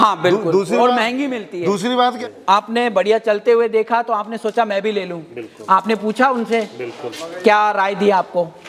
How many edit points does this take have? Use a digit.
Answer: 1